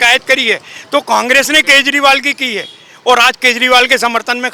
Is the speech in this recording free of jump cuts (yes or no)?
yes